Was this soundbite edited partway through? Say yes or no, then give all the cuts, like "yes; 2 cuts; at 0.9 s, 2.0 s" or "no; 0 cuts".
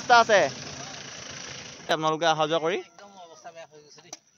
yes; 1 cut; at 1.9 s